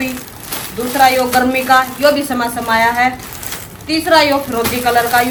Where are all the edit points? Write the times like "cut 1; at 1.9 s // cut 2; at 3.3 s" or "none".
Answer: none